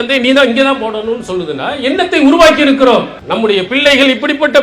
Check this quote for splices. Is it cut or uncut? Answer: cut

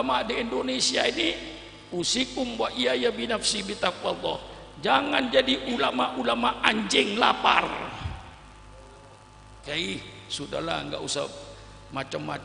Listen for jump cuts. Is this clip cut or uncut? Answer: cut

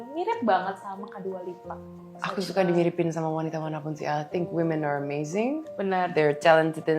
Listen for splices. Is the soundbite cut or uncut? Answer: cut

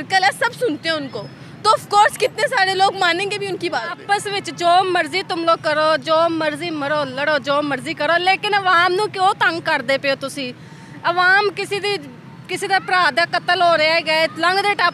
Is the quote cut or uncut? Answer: cut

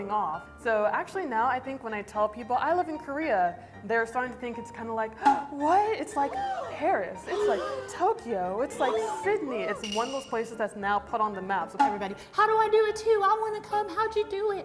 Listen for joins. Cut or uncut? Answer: cut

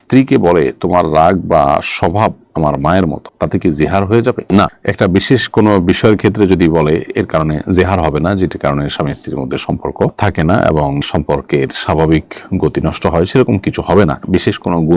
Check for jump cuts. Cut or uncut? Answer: uncut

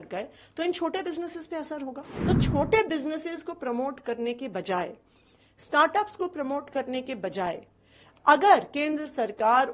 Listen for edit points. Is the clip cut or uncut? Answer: cut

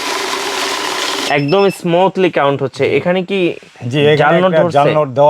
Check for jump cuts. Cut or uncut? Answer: uncut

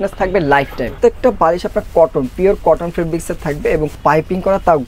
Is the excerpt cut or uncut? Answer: cut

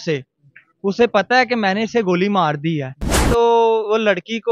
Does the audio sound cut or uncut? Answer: cut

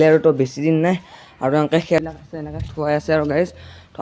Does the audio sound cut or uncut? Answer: cut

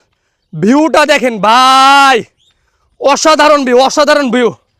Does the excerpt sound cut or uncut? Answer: uncut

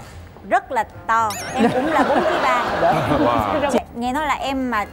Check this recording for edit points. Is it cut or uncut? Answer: cut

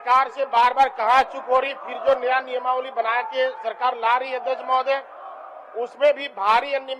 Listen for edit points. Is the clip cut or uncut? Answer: uncut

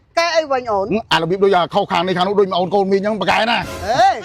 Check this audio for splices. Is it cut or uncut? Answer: uncut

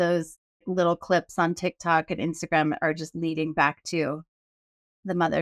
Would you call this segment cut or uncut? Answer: uncut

